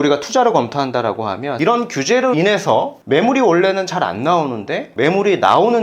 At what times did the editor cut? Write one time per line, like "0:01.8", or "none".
0:01.5
0:03.0